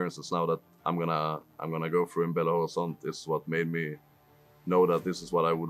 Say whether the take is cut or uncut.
uncut